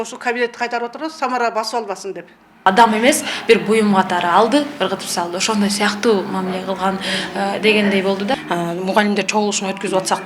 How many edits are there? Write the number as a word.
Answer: two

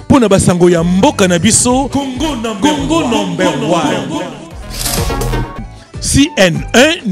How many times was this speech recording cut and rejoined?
zero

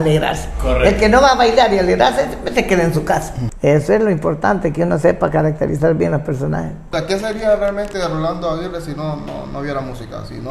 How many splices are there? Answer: two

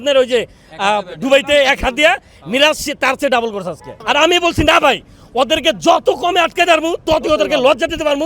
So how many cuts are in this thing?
one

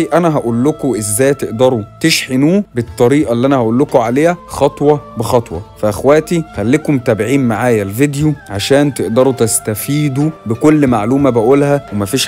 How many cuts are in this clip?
zero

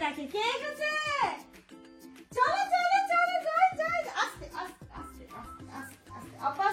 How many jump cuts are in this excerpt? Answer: zero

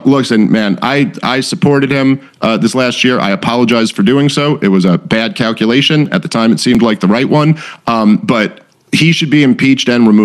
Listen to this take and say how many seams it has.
zero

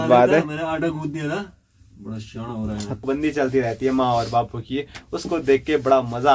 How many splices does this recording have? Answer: one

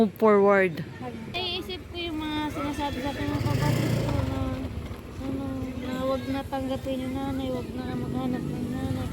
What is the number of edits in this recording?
one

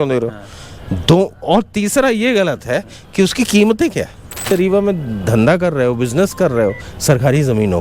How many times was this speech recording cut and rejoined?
one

